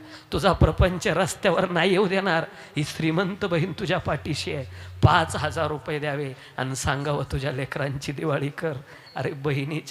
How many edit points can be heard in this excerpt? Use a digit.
0